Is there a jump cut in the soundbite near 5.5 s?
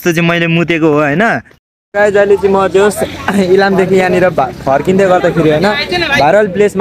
no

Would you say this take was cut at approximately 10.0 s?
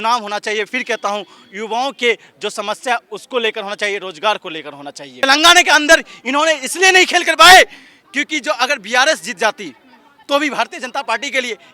no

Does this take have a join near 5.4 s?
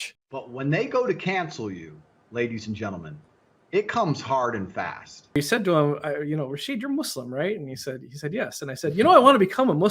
yes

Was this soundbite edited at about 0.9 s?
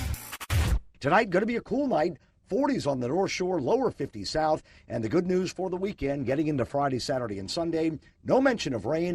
yes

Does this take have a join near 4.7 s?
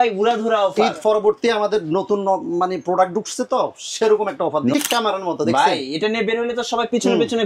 yes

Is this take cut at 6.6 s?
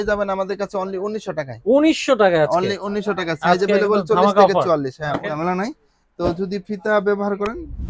no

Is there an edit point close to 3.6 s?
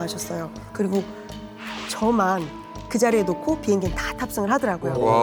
no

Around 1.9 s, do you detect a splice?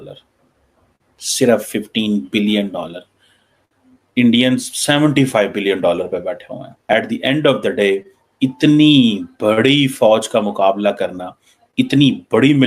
no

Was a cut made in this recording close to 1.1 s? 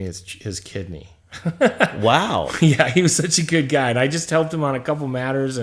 no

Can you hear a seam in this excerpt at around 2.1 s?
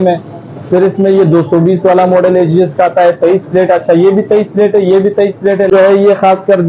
no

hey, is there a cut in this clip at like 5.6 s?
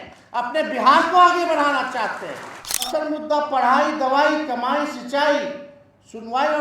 no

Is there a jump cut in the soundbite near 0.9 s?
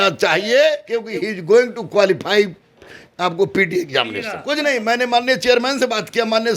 yes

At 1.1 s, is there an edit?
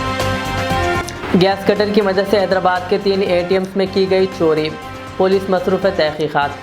yes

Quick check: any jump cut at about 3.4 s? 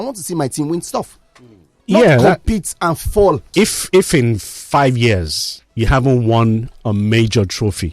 yes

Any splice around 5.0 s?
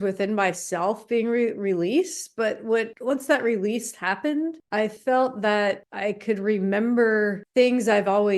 no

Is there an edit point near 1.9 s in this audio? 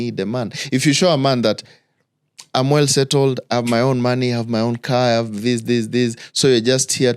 no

